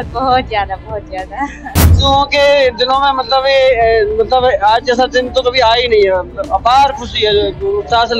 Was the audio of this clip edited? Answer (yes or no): yes